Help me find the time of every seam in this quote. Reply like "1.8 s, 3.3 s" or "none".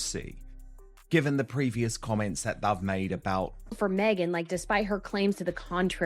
3.6 s